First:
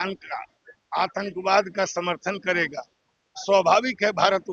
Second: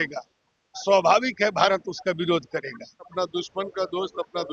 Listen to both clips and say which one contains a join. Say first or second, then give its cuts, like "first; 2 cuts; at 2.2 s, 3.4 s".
second; 1 cut; at 3.1 s